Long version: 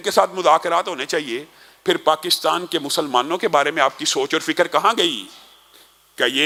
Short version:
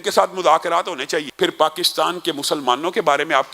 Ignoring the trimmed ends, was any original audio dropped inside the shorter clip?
yes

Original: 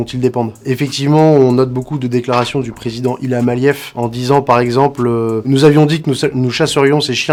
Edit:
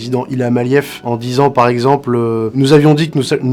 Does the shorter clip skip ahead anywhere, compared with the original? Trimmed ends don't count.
no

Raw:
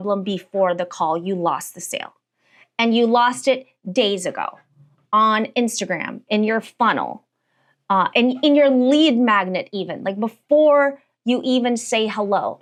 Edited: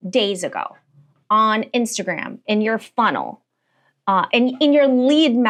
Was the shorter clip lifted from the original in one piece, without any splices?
yes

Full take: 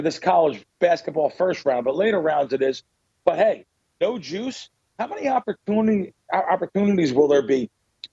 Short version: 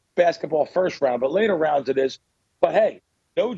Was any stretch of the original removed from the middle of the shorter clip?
no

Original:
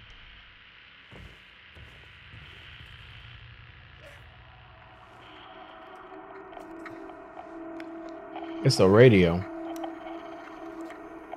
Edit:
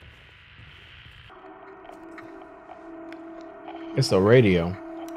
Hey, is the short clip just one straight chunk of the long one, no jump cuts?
no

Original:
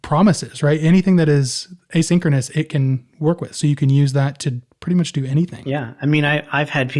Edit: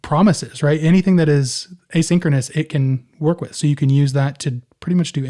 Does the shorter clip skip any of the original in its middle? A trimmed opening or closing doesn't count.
no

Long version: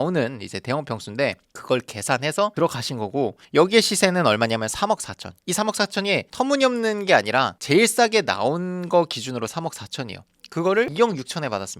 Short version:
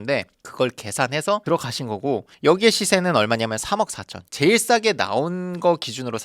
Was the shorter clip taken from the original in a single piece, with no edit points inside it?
no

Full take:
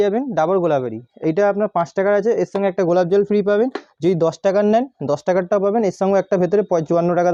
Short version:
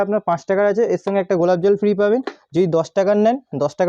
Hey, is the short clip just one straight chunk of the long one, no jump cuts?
yes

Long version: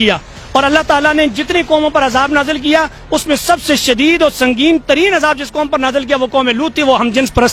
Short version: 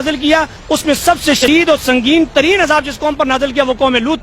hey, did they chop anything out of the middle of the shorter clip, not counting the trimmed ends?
yes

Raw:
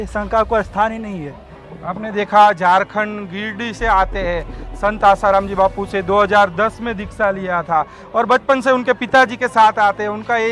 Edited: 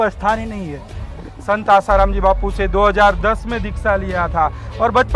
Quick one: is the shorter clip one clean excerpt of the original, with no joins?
no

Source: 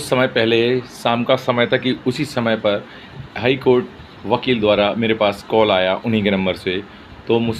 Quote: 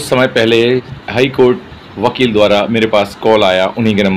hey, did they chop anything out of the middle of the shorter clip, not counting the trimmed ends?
yes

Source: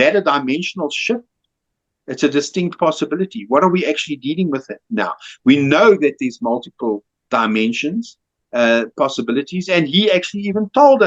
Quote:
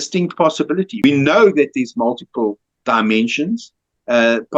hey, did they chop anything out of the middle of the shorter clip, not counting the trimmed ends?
yes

